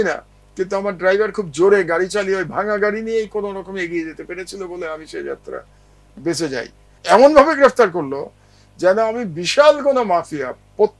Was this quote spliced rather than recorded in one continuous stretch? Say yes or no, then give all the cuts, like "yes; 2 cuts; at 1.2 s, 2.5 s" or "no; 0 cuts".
yes; 1 cut; at 6.9 s